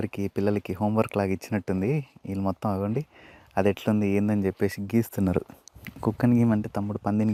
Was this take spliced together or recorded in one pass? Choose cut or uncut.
uncut